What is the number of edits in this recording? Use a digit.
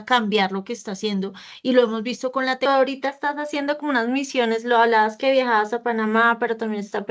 1